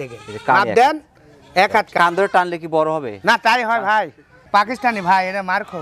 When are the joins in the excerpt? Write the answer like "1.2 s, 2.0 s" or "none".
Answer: 1.9 s, 4.5 s